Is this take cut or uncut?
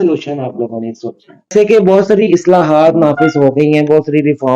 cut